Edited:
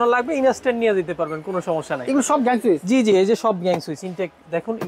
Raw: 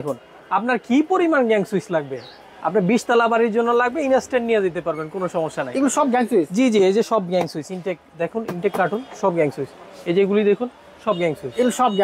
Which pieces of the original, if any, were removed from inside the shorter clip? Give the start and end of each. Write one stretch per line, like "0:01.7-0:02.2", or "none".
none